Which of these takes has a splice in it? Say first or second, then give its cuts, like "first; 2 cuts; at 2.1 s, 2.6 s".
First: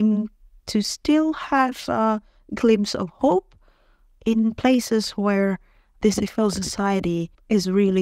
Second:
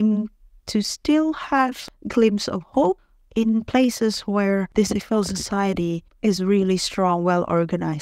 second; 3 cuts; at 1.8 s, 3.1 s, 4.7 s